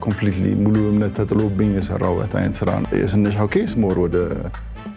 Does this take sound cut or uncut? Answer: cut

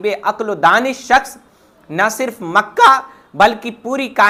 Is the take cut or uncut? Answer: uncut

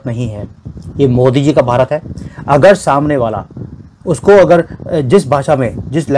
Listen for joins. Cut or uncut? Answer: uncut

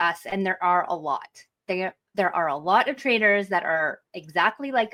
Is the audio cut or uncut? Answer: uncut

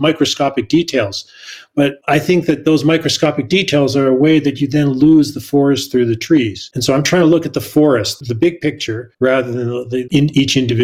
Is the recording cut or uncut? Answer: uncut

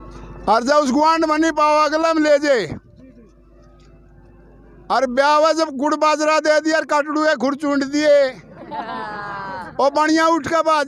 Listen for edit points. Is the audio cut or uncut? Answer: uncut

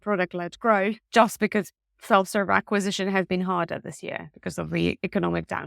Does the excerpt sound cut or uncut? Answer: cut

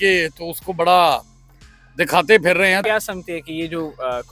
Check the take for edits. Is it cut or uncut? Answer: cut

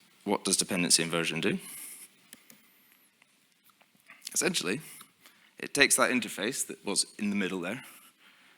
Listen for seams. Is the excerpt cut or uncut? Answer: cut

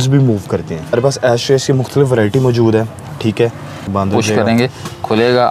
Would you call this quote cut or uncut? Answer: cut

